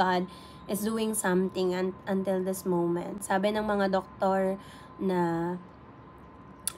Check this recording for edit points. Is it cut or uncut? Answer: uncut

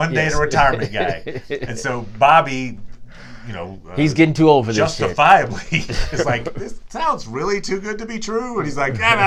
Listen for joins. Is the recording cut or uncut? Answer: uncut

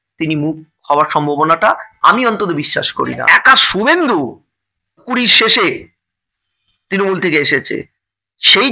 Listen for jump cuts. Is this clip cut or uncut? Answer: cut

